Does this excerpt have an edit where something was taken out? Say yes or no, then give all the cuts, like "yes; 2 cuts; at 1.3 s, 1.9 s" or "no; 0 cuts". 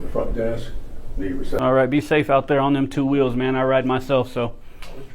yes; 1 cut; at 1.6 s